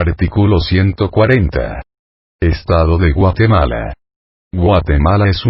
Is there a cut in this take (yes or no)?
yes